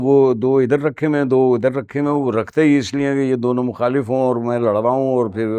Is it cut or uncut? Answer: uncut